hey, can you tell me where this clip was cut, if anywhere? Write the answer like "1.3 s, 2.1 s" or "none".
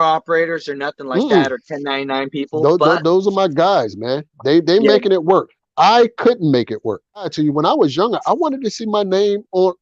7.3 s